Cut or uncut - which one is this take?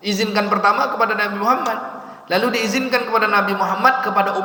uncut